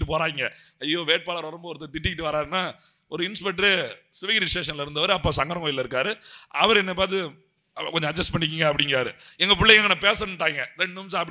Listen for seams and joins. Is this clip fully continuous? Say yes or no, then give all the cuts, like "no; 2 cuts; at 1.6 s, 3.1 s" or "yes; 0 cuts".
yes; 0 cuts